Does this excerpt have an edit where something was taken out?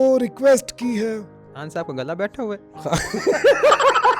no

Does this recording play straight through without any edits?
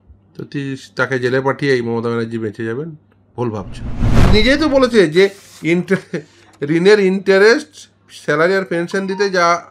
no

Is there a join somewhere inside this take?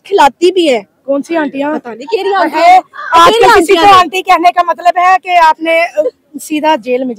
no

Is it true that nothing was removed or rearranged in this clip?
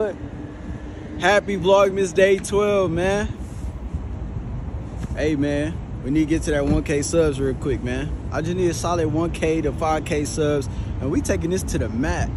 yes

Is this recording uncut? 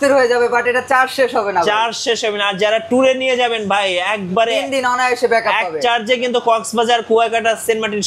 yes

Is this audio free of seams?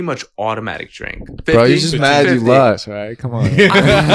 no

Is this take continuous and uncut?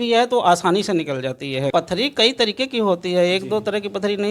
no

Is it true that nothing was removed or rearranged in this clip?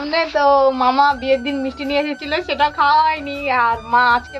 yes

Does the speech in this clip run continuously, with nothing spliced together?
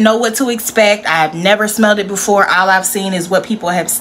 yes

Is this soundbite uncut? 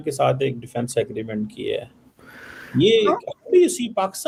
yes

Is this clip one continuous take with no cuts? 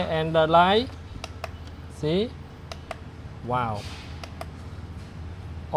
yes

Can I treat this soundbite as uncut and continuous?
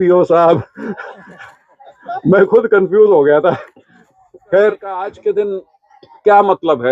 no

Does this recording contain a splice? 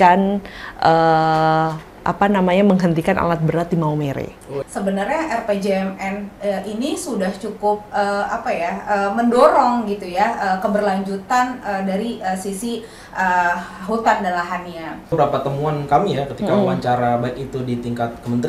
yes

